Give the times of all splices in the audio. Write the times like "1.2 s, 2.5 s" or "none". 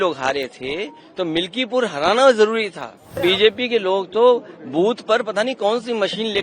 3.2 s